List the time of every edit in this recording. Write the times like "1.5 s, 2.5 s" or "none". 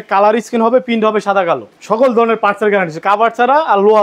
1.7 s